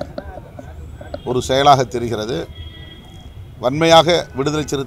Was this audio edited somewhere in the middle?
no; 0 cuts

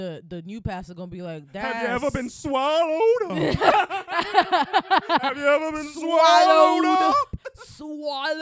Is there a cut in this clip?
no; 0 cuts

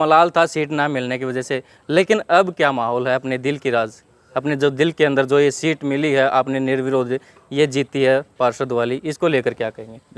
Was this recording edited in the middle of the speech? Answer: no; 0 cuts

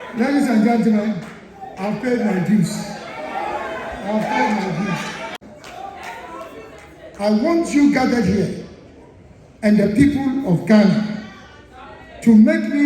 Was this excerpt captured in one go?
no; 1 cut; at 5.4 s

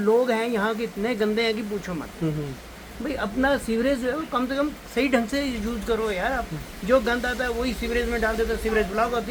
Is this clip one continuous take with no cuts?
yes; 0 cuts

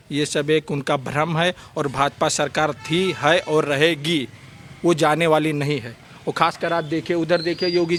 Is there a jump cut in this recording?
no; 0 cuts

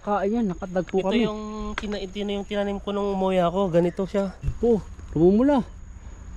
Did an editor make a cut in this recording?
yes; 1 cut; at 4.4 s

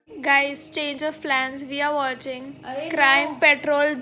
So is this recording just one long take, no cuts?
yes; 0 cuts

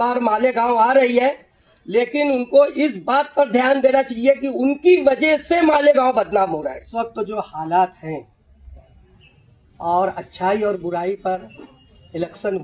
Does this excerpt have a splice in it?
yes; 1 cut; at 6.9 s

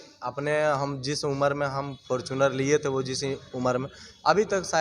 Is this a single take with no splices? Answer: yes; 0 cuts

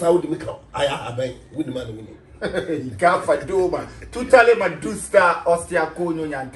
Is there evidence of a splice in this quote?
no; 0 cuts

